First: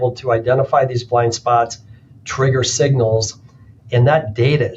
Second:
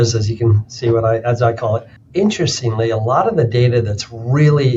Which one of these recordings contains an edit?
second; 1 cut; at 1.9 s

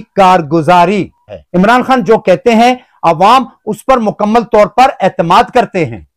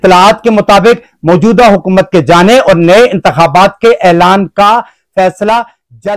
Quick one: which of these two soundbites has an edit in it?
first; 1 cut; at 1.4 s

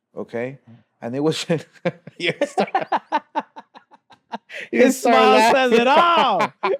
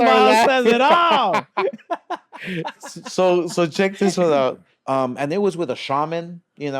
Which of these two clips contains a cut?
second; 1 cut; at 4.7 s

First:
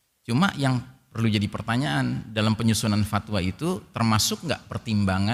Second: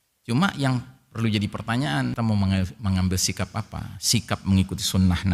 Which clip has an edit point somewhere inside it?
second; 1 cut; at 2.1 s

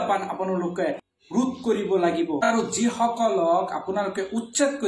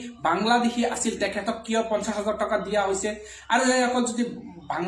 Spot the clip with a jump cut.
first; 2 cuts; at 1.1 s, 2.4 s

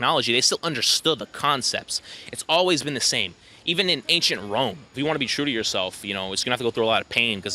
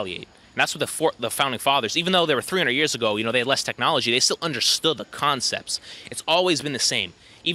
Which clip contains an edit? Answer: first; 1 cut; at 5.0 s

